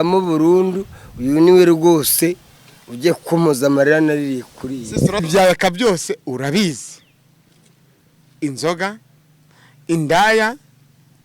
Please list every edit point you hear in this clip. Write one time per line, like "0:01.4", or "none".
0:05.2